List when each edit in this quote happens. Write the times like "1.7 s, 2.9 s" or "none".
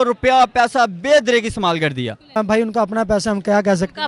2.4 s